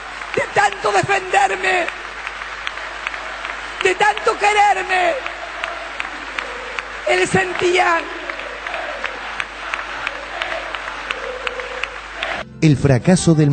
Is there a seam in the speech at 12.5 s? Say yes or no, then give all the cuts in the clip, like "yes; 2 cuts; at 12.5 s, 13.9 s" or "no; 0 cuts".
yes; 1 cut; at 12.5 s